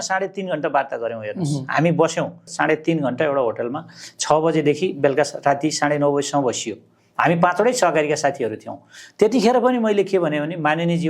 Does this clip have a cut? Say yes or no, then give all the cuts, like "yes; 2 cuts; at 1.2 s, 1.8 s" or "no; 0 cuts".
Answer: yes; 1 cut; at 2.4 s